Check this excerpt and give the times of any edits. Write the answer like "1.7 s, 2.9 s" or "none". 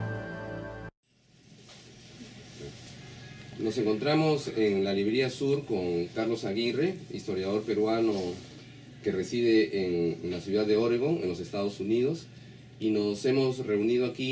none